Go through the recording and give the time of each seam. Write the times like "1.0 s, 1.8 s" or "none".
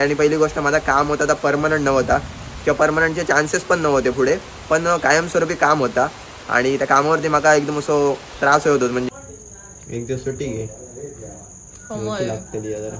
9.1 s